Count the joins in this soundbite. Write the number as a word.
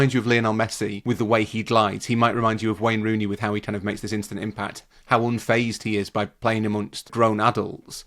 two